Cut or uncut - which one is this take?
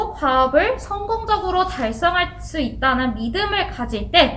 uncut